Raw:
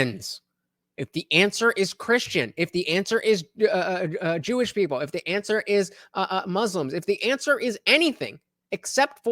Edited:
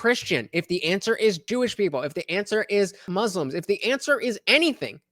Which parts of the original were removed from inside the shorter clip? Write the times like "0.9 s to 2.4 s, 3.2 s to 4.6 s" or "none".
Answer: 3.5 s to 4.4 s, 6.0 s to 6.5 s